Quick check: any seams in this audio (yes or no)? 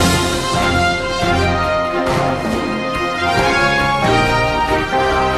no